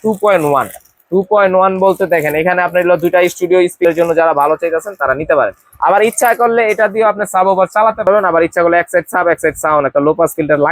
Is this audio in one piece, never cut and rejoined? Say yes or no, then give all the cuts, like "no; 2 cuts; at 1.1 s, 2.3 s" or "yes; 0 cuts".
no; 2 cuts; at 3.8 s, 8.1 s